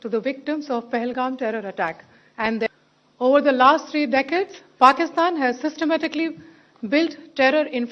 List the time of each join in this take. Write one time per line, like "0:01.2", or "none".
0:02.7

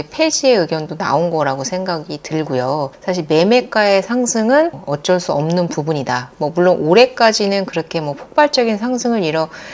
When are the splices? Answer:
none

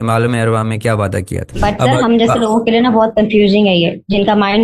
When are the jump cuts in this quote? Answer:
0:01.4

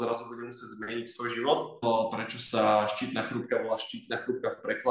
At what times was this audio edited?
0:01.8

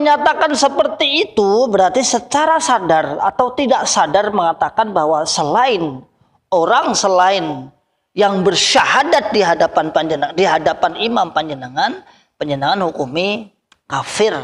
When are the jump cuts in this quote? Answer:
none

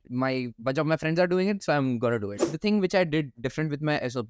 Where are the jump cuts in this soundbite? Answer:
0:02.5

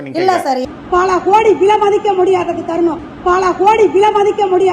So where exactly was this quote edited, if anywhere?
0:03.0

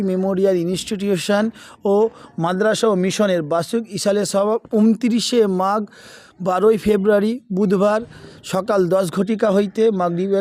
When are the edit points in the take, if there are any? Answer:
none

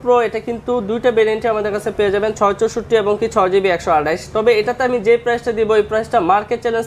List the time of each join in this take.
none

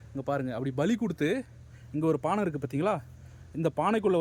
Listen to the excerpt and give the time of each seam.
none

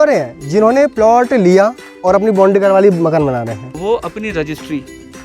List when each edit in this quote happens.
0:03.8

